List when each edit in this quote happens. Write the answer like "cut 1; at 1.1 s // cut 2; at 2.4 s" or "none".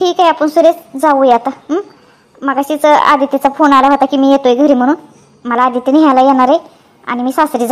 none